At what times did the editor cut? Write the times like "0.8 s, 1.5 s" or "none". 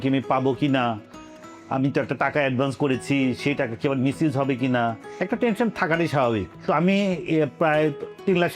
none

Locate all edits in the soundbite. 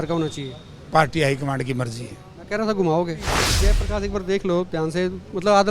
3.5 s

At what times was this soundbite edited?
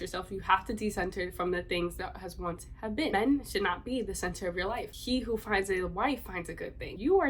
3.1 s, 4.9 s

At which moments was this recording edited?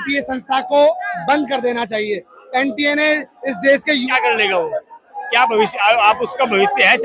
4.0 s

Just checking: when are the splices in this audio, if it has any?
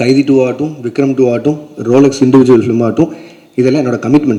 none

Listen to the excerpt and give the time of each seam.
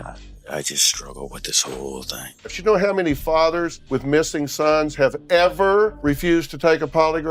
2.5 s, 3.8 s, 6.0 s

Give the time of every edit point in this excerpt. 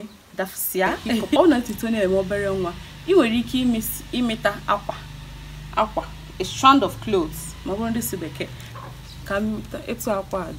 1.4 s

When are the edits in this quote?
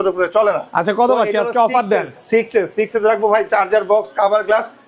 none

